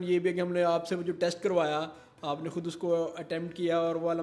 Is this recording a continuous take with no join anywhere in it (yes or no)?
yes